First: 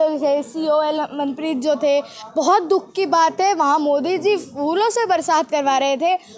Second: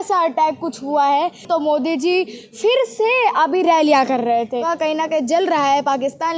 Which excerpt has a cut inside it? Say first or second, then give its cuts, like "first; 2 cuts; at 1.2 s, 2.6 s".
second; 2 cuts; at 1.4 s, 4.6 s